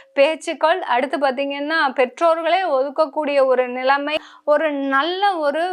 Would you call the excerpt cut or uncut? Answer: cut